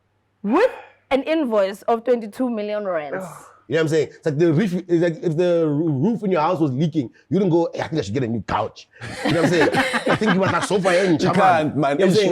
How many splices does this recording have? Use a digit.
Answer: 1